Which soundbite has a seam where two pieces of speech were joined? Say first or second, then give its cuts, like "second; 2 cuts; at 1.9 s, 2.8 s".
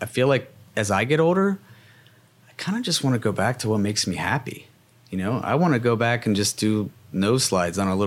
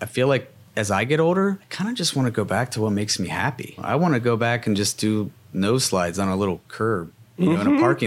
second; 3 cuts; at 1.7 s, 3.8 s, 6.7 s